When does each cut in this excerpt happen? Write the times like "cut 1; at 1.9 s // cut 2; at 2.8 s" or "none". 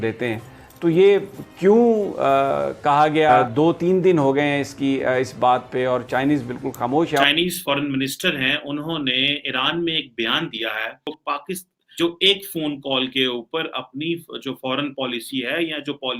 cut 1; at 3.5 s // cut 2; at 7.2 s // cut 3; at 11.5 s